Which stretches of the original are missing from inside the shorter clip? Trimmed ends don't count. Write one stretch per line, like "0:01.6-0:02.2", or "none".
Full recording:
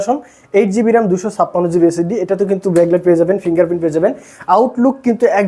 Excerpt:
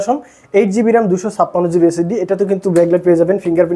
none